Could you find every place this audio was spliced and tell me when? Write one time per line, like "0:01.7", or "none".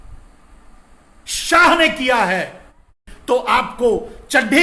0:03.1

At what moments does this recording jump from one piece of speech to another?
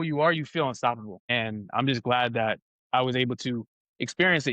0:01.2

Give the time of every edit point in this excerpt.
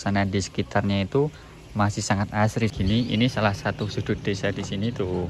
0:02.7

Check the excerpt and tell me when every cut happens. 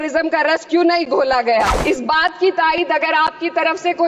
0:01.8

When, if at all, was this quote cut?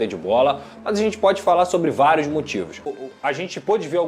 0:02.8

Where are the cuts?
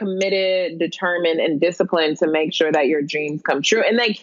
none

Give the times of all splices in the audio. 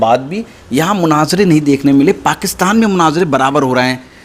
none

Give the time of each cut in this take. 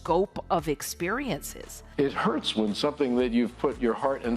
0:01.7

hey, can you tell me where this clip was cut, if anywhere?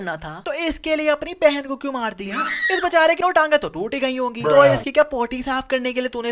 0:03.2

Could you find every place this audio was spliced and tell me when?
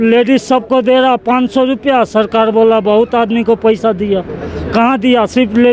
none

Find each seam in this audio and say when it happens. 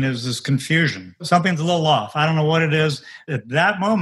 0:01.2
0:03.3

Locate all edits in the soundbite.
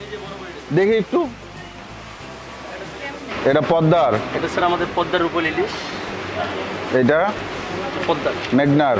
0:03.3

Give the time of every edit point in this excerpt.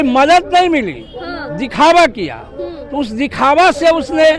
none

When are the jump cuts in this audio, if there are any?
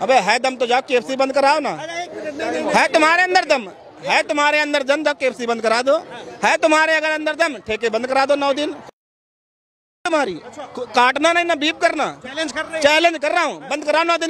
none

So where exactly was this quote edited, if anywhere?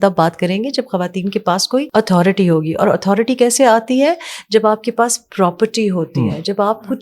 0:01.9

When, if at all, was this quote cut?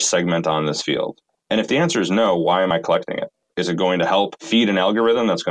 0:04.4

